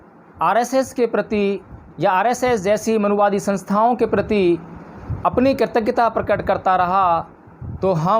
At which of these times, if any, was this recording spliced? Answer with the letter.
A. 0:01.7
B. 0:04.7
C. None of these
A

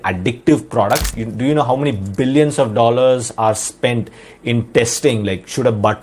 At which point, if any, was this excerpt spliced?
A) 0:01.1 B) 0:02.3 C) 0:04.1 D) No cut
A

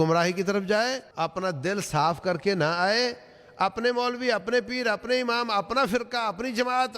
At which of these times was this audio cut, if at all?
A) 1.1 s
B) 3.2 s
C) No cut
A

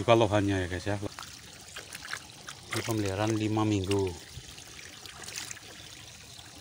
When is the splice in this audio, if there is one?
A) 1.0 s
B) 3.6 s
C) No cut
A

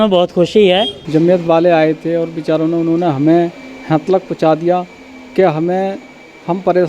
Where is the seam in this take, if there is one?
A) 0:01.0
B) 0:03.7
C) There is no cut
A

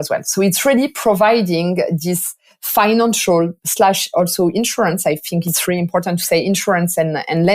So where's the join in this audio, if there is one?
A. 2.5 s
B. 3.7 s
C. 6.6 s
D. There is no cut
D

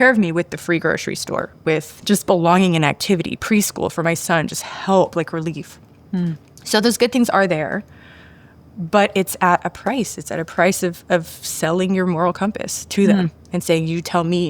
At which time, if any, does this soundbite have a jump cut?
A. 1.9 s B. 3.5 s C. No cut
A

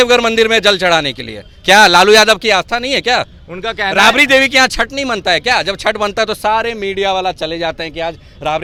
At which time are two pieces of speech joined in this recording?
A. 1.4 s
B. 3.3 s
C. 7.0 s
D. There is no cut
D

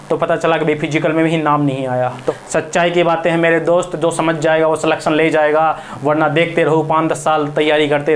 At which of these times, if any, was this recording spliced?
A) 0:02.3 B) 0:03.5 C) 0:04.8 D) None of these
A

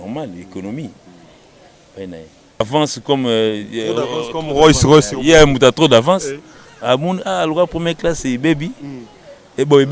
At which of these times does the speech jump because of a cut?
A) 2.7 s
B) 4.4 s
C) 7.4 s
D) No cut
A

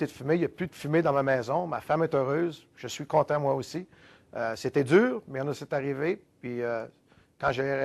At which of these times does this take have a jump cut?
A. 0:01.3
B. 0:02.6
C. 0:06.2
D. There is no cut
D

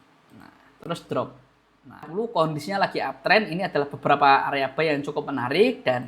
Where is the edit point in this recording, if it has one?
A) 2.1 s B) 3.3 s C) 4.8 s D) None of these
A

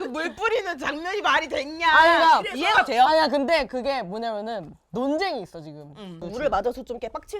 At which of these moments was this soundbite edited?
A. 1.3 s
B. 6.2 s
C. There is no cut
B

